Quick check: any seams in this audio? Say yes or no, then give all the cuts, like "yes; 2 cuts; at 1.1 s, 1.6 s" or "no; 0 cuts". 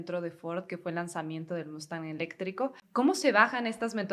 yes; 1 cut; at 2.8 s